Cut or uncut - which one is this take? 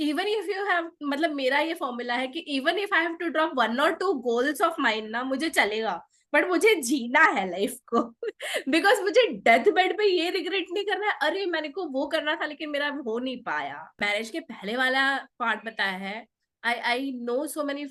cut